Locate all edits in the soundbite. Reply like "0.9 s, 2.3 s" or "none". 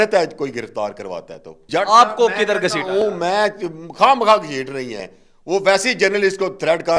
1.6 s

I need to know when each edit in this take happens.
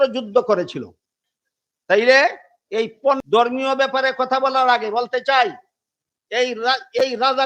3.2 s

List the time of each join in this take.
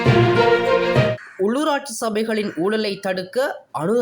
1.1 s

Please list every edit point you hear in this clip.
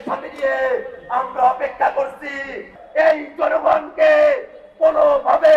2.8 s

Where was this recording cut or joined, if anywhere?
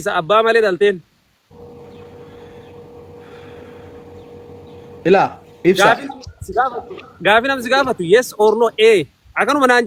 none

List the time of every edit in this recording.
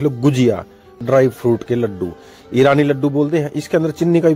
1.0 s

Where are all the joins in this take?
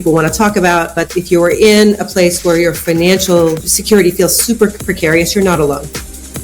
3.7 s

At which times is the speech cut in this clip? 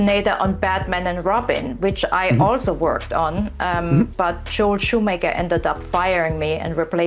none

